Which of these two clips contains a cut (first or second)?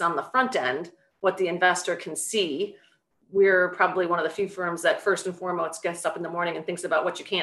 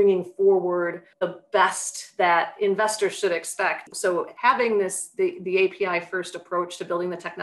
second